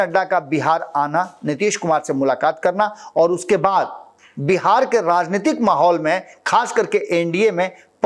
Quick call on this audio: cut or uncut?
uncut